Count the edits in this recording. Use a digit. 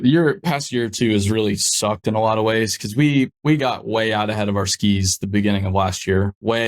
0